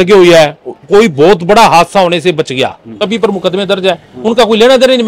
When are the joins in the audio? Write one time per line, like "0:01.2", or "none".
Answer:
0:02.9